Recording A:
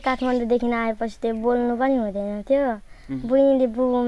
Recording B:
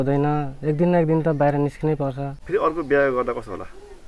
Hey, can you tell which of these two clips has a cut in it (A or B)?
B